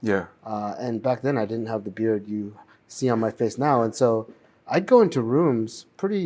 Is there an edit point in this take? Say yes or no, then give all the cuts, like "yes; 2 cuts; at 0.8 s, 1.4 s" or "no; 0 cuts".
no; 0 cuts